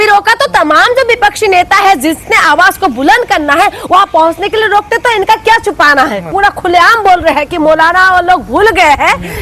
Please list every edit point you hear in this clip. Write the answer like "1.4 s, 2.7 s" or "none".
6.3 s